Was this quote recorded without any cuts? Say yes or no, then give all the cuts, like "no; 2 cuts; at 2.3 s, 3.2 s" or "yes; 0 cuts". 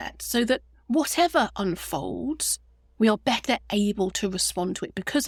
yes; 0 cuts